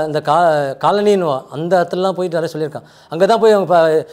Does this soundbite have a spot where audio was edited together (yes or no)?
no